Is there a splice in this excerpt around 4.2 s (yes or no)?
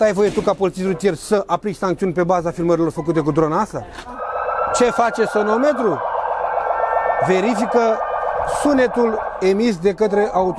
yes